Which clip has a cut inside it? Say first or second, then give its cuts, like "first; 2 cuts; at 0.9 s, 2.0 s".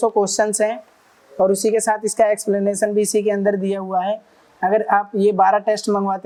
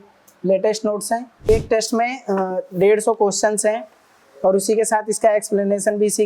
second; 1 cut; at 1.5 s